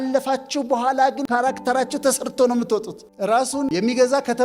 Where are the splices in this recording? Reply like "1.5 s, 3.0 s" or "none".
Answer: 1.2 s, 3.0 s, 3.7 s